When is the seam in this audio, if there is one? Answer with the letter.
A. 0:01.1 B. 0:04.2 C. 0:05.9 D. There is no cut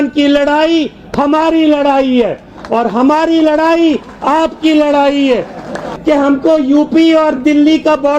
C